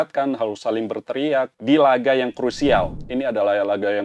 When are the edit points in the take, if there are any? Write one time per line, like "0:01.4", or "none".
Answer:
0:01.5
0:03.0